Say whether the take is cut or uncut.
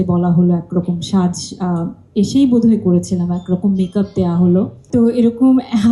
cut